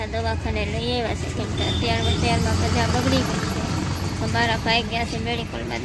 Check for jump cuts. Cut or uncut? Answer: uncut